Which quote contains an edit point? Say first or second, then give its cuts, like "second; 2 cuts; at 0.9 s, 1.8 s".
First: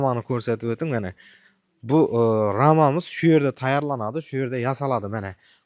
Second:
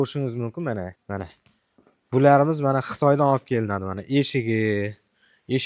second; 1 cut; at 1.0 s